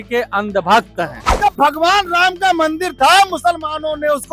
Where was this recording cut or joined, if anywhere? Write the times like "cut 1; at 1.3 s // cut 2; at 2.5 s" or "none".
cut 1; at 1.2 s